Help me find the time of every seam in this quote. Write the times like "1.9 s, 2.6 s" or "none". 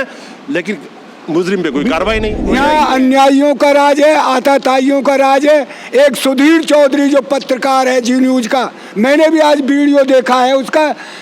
2.4 s

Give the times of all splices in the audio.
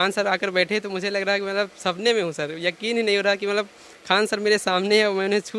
none

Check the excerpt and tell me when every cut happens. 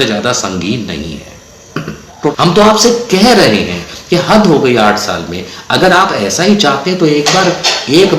2.3 s

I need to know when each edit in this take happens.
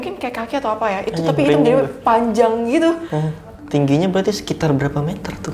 3.5 s

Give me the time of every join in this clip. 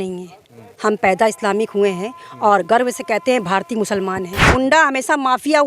4.4 s

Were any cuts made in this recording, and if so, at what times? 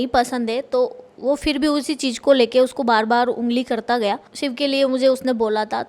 4.3 s

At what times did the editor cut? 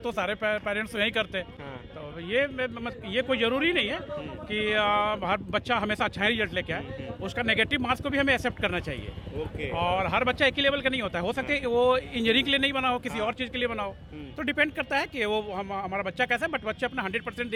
none

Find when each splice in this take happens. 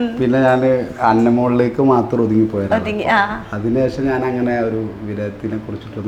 none

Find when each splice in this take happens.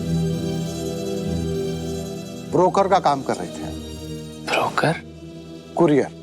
3.6 s

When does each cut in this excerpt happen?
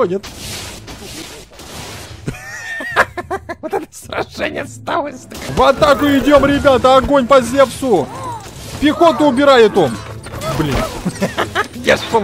5.5 s

